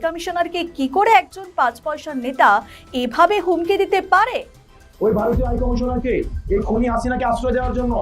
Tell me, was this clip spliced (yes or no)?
no